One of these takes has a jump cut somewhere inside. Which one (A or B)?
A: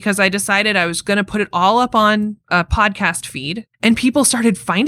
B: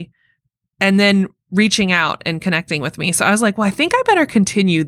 A